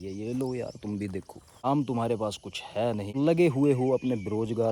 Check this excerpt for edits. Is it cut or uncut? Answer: cut